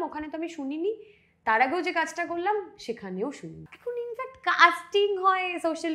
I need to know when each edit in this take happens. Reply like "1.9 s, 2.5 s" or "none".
3.7 s